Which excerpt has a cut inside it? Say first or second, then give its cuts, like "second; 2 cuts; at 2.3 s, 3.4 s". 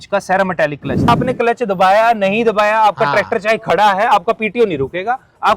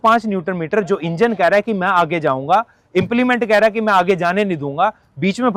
first; 1 cut; at 1.1 s